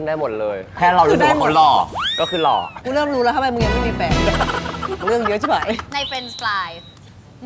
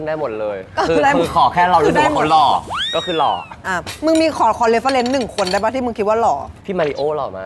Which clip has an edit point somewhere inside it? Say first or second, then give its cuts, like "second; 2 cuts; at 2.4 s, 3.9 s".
first; 4 cuts; at 0.8 s, 2.8 s, 5.0 s, 5.9 s